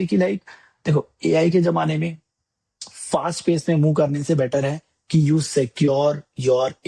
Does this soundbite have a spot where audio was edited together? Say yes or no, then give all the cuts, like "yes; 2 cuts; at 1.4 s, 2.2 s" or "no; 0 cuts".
no; 0 cuts